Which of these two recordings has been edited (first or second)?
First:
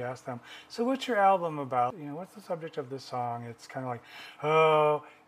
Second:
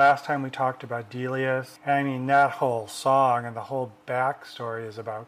first